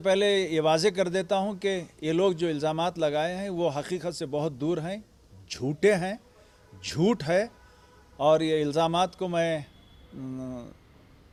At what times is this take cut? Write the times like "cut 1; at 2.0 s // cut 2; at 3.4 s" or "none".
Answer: none